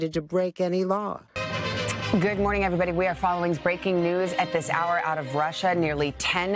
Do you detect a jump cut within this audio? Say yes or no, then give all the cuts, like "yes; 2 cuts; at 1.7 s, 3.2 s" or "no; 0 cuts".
yes; 1 cut; at 1.3 s